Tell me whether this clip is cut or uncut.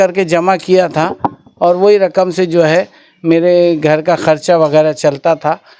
uncut